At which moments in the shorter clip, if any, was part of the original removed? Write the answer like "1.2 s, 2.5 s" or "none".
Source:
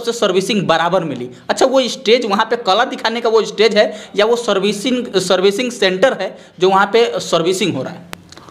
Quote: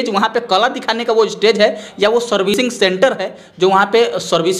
2.6 s

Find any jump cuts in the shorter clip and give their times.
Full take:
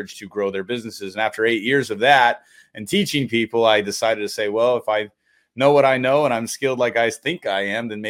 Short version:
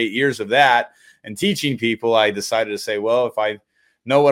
none

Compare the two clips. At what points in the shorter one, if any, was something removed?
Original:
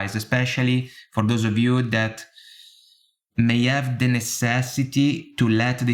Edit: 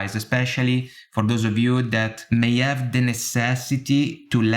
2.2 s

